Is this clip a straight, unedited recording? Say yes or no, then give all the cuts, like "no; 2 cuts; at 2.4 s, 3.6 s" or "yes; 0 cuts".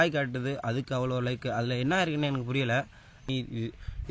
no; 1 cut; at 3.2 s